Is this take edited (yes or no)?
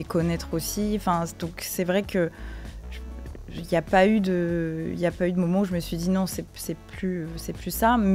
no